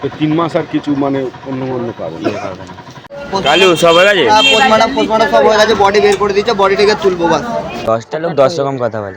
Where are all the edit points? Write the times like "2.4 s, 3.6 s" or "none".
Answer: 3.0 s, 7.7 s